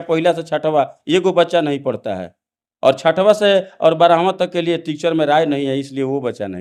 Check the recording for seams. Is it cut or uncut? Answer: uncut